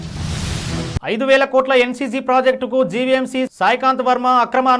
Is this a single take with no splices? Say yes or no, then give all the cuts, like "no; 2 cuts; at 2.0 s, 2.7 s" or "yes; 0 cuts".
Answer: yes; 0 cuts